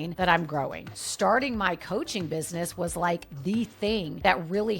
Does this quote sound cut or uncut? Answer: cut